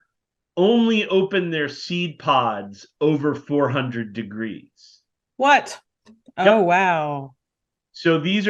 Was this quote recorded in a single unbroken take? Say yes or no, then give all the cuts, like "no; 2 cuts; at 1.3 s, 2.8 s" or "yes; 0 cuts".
yes; 0 cuts